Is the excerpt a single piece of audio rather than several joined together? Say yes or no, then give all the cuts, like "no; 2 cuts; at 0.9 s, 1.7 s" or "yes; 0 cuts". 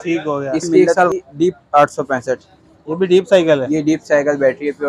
no; 1 cut; at 1.1 s